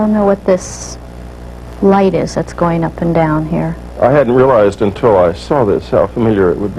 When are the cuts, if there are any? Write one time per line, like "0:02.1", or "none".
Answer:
0:03.8